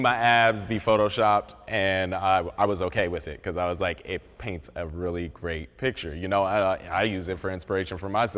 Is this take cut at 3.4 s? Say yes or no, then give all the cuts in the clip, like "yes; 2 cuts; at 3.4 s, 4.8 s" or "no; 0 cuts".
no; 0 cuts